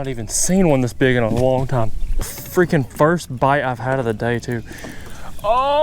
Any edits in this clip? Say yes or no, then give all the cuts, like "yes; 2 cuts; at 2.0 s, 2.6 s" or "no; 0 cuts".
yes; 1 cut; at 2.3 s